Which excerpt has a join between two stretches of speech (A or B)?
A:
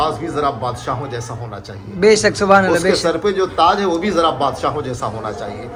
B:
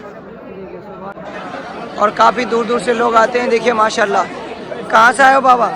B